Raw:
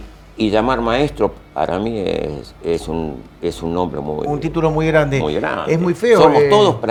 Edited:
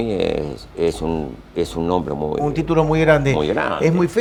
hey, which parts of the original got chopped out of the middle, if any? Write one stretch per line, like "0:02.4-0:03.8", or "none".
none

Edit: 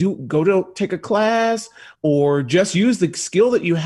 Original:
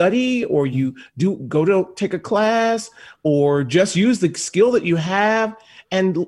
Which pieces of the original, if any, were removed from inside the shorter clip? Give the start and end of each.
none

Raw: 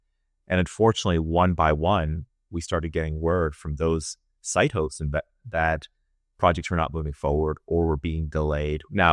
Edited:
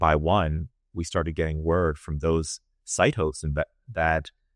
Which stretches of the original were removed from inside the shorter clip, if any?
none

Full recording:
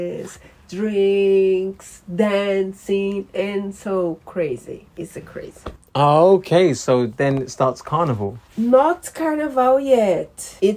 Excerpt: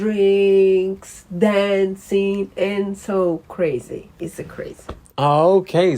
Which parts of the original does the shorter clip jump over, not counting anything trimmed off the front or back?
none

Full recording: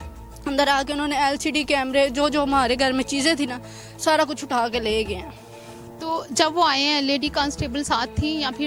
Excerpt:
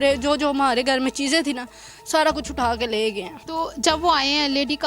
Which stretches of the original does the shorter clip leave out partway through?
0:05.3-0:05.9

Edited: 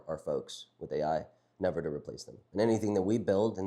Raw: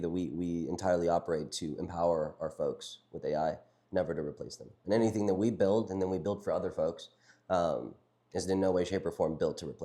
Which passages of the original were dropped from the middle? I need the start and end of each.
none

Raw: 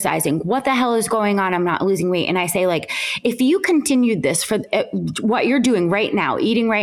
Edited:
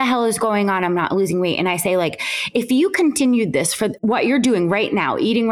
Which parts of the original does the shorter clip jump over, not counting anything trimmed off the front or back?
0:04.6-0:05.2

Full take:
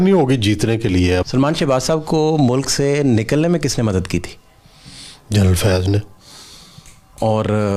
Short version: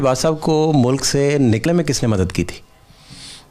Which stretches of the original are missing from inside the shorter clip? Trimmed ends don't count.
0:03.3-0:03.4

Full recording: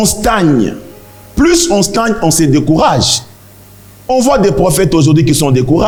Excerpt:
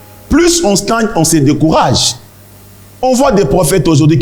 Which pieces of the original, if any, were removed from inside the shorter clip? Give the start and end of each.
none

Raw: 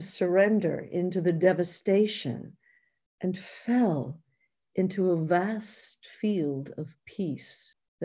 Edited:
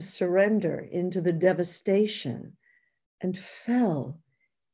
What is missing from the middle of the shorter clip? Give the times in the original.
none

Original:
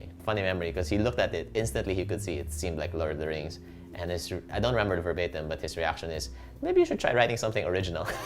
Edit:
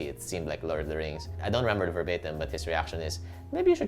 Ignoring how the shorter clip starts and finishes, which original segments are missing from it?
0:03.7-0:04.4

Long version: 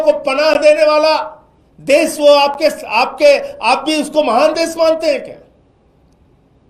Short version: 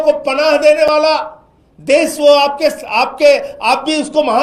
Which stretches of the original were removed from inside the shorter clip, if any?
none

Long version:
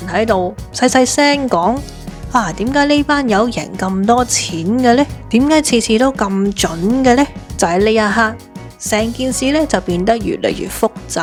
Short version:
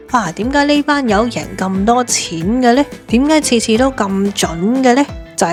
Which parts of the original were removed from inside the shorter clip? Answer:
none

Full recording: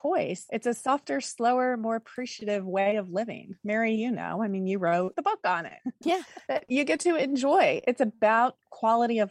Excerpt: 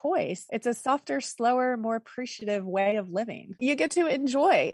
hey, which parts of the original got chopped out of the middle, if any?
0:03.6-0:06.6

